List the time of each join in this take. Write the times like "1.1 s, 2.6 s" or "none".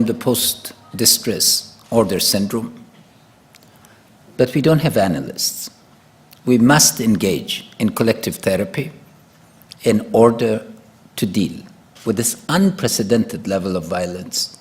none